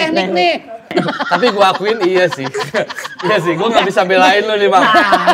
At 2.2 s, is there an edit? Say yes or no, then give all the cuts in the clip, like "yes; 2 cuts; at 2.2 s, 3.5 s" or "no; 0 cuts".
no; 1 cut; at 0.9 s